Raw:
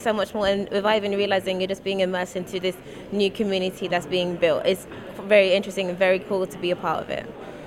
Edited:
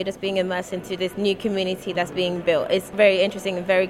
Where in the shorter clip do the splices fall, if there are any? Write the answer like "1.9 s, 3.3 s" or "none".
1.1 s, 2.9 s